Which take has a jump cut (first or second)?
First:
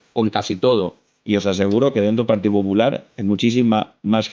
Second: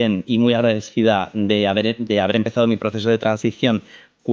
first